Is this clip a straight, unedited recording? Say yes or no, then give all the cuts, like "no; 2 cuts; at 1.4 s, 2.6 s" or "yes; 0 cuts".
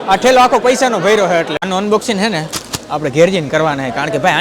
no; 1 cut; at 1.6 s